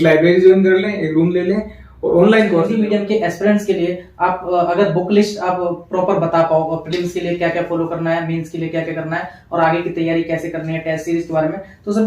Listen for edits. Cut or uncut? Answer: cut